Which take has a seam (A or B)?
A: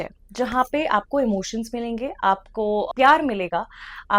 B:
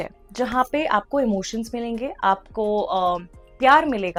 A